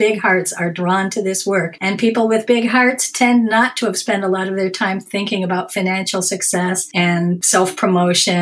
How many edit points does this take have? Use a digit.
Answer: 2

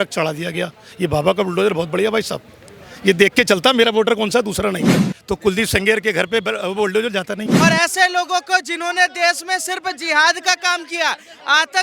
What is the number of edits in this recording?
2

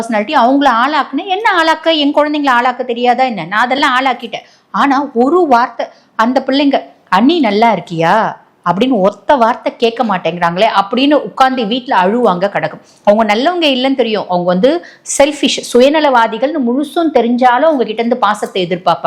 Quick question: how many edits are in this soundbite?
0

